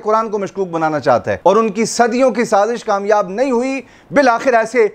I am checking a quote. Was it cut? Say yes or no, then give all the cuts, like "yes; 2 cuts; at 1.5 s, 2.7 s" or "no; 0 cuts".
yes; 1 cut; at 1.3 s